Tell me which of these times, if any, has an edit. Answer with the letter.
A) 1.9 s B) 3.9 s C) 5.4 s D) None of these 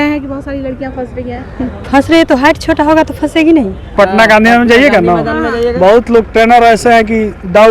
B